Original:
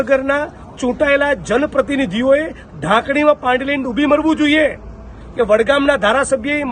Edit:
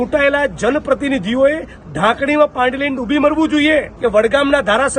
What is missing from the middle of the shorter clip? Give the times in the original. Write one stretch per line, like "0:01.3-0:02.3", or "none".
0:04.8-0:05.3